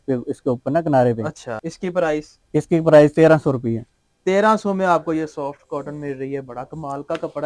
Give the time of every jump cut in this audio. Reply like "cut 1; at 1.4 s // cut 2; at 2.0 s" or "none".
none